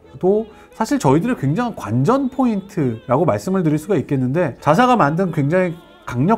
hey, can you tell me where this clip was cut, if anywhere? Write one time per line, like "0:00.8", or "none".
0:04.6